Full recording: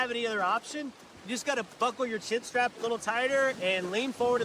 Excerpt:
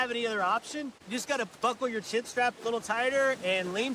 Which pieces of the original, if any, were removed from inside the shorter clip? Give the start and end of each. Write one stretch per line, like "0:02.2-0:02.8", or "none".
0:01.0-0:01.2